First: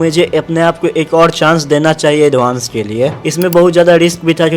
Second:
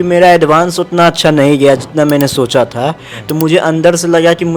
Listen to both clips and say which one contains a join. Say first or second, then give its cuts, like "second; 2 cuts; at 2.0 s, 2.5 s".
first; 1 cut; at 3.2 s